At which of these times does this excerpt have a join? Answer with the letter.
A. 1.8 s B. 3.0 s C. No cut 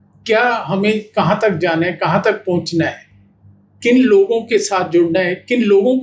C